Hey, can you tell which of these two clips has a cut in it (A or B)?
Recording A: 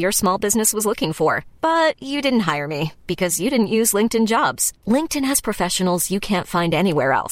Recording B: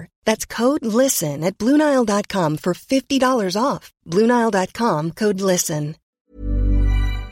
B